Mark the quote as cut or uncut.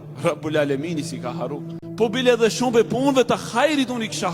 cut